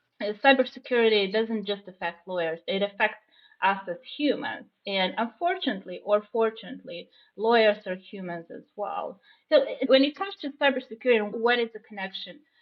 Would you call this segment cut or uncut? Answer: uncut